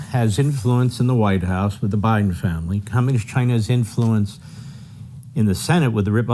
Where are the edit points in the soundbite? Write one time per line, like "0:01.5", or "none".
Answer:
none